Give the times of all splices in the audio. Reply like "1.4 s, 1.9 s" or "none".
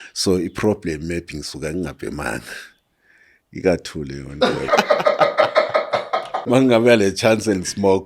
4.6 s, 6.3 s